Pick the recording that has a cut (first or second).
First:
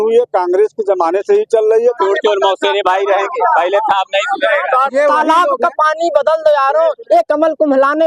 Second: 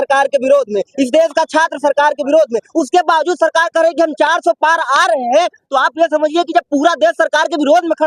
first